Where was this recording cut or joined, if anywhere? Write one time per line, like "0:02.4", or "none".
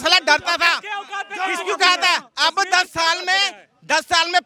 none